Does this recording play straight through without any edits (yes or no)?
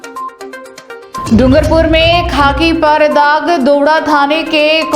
no